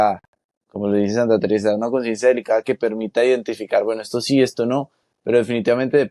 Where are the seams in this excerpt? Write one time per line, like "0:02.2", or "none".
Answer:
none